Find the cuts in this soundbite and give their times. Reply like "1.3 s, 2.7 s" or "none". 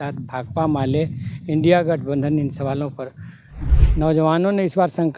3.5 s